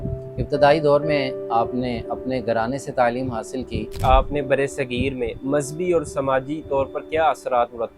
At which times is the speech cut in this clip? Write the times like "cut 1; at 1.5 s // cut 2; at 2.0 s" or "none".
cut 1; at 3.8 s